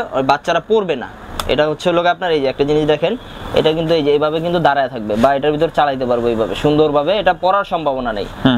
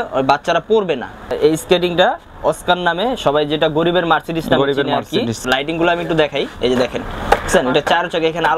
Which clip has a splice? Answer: second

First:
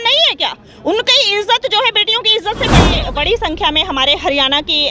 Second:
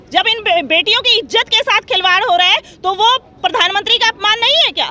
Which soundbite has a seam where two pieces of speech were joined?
first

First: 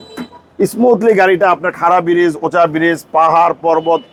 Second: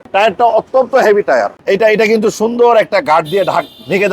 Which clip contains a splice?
second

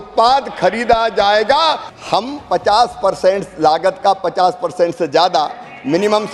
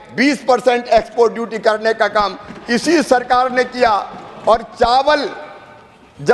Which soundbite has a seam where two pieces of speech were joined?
first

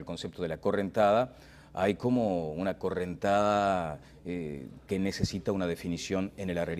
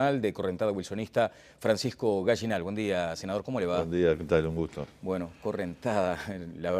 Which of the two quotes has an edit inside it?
first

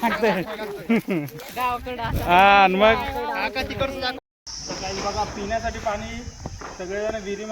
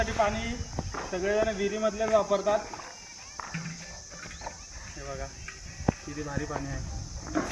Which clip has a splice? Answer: first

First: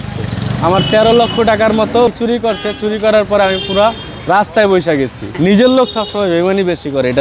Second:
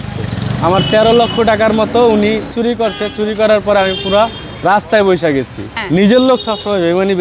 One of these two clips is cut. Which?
first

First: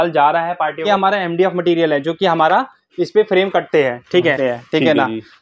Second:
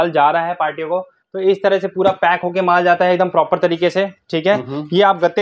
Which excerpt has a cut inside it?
first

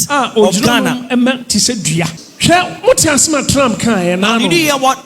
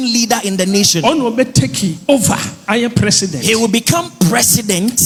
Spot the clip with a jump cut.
first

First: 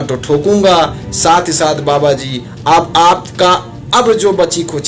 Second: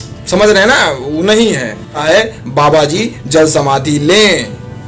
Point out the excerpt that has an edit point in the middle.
second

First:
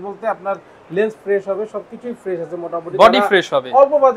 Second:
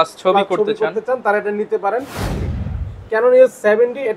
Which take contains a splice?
second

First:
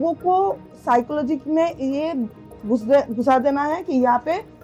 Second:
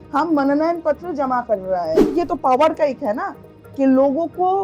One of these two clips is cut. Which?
second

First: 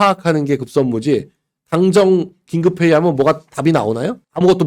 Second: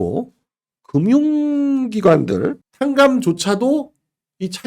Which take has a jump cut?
second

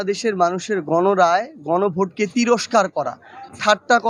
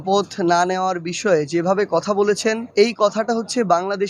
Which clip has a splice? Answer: second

